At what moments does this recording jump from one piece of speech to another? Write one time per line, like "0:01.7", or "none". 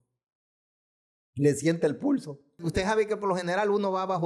0:02.6